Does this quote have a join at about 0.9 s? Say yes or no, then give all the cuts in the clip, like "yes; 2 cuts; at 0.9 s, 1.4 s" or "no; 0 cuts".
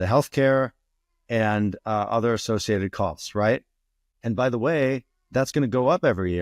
no; 1 cut; at 4.0 s